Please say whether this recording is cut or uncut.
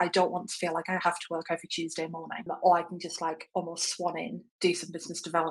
cut